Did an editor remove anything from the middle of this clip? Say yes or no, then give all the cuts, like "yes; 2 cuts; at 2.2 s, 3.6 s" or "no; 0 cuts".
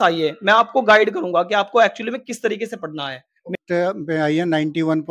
yes; 1 cut; at 3.5 s